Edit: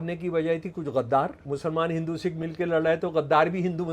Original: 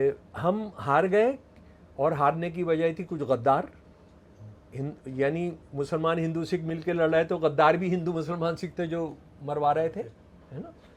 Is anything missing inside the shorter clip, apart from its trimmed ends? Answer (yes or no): yes